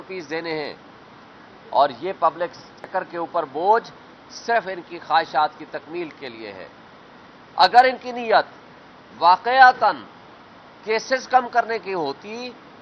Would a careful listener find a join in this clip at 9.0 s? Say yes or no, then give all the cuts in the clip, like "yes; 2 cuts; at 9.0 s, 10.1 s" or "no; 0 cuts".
no; 1 cut; at 2.8 s